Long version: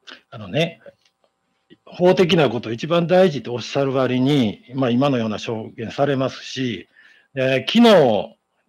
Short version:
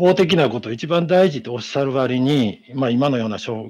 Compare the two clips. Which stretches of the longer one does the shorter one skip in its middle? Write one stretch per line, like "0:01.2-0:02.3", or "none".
none